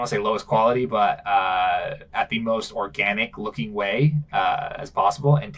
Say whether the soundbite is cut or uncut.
uncut